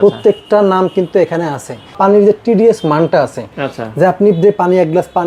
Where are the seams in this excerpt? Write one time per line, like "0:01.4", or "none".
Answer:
0:01.9